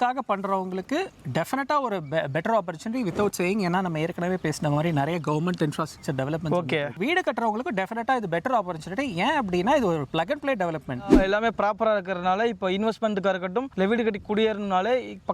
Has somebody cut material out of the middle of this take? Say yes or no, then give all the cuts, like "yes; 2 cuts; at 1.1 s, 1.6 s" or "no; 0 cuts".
yes; 2 cuts; at 7.0 s, 11.1 s